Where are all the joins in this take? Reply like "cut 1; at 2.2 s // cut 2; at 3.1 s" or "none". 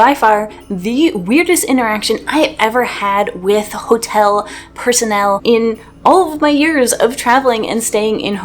cut 1; at 5.4 s

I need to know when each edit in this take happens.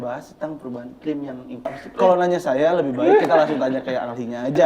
cut 1; at 1.8 s

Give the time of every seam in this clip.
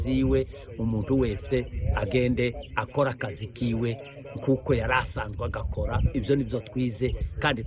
cut 1; at 6.7 s

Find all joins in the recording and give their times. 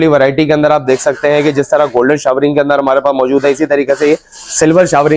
none

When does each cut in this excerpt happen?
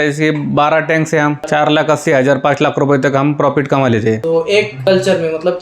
cut 1; at 1.4 s // cut 2; at 4.4 s

